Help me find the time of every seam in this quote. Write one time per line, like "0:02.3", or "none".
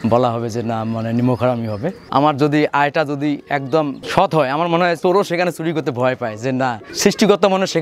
0:02.0
0:04.0
0:05.0
0:06.9